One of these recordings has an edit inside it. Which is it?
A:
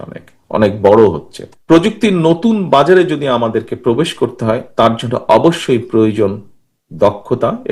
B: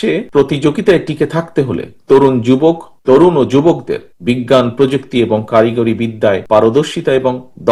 A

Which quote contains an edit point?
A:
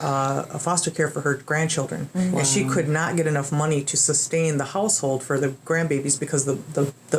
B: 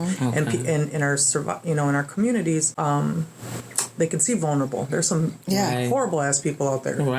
B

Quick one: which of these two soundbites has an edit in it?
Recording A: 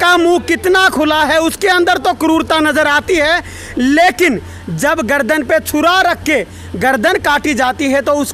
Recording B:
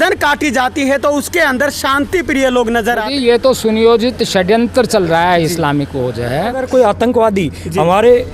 B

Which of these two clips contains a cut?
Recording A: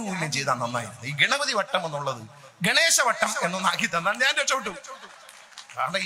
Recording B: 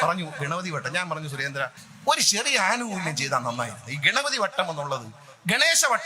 B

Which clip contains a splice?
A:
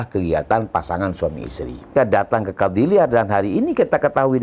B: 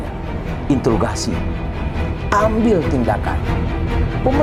A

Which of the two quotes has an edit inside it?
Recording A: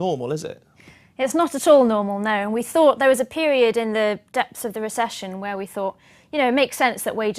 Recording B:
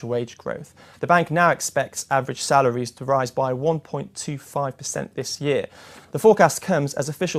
A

